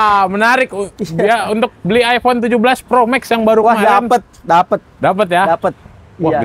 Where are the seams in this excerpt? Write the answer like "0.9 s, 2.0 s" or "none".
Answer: none